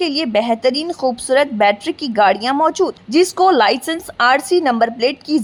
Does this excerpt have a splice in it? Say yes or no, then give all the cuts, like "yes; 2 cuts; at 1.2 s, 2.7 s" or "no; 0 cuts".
no; 0 cuts